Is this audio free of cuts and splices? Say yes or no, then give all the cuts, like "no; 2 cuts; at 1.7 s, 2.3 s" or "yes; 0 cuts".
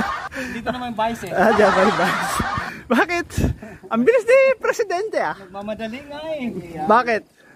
yes; 0 cuts